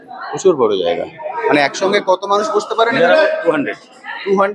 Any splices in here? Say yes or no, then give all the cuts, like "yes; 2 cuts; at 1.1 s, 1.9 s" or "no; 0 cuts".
no; 0 cuts